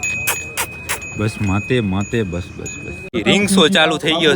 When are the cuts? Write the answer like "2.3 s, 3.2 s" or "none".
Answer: 3.1 s